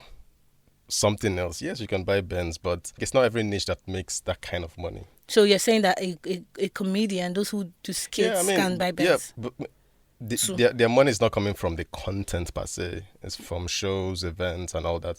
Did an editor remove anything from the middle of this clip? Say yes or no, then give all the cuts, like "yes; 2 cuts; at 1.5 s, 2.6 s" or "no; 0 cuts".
no; 0 cuts